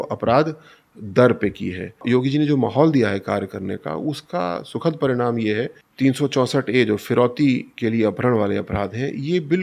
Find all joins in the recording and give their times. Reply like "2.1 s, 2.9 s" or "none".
2.0 s, 5.8 s